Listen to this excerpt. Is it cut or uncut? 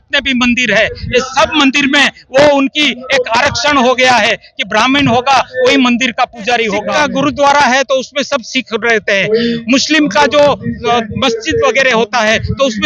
cut